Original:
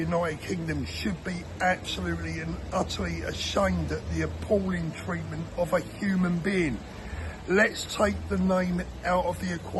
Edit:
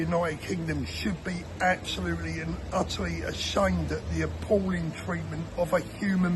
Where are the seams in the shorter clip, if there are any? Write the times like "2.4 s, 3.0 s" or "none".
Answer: none